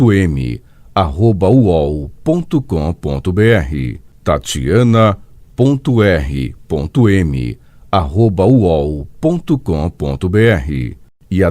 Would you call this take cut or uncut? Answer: cut